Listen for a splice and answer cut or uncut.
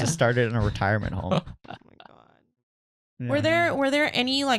cut